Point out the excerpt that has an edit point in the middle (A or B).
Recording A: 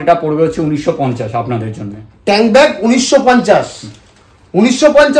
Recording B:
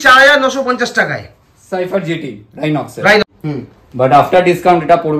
B